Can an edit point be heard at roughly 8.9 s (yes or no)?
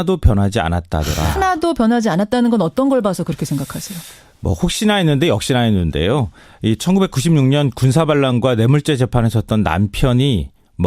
no